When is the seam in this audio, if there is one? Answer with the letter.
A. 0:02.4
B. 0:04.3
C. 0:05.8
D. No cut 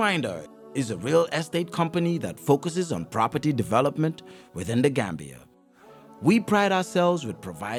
D